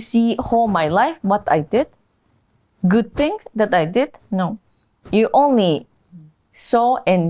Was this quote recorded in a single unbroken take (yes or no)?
yes